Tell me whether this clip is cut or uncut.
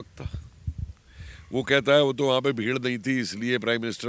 uncut